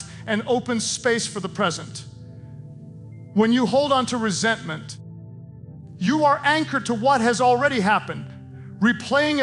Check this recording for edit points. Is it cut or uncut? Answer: cut